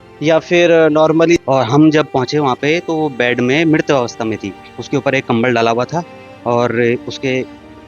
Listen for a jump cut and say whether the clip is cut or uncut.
cut